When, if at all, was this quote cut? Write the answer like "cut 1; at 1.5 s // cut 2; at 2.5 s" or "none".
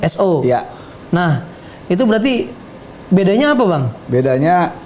none